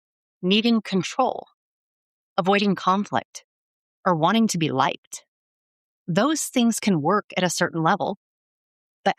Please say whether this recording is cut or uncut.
uncut